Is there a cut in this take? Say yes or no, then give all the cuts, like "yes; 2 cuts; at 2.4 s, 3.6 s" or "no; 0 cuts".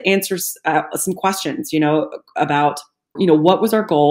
yes; 1 cut; at 3.2 s